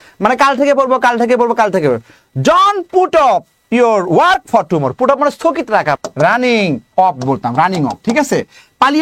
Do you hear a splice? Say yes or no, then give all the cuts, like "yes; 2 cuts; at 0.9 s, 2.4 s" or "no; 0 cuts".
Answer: yes; 1 cut; at 6.0 s